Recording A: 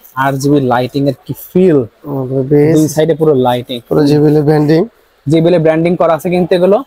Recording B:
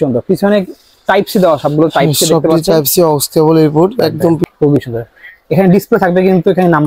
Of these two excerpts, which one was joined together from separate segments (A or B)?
B